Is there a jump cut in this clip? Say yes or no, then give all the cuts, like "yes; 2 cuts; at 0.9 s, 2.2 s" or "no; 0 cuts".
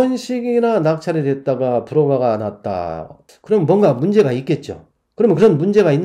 no; 0 cuts